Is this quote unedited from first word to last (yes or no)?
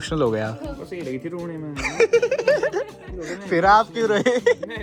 yes